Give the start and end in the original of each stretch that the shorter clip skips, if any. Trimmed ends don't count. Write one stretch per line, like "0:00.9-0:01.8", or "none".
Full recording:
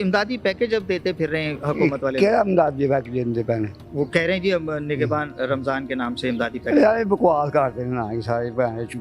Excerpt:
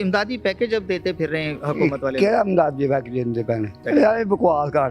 0:03.8-0:06.6